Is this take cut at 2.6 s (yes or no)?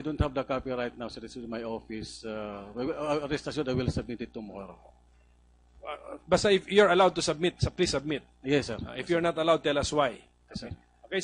yes